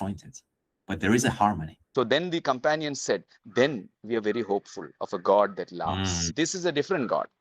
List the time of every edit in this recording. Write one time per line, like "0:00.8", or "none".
0:01.7
0:06.1